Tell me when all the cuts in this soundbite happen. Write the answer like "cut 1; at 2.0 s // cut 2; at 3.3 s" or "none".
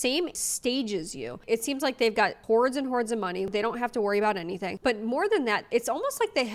none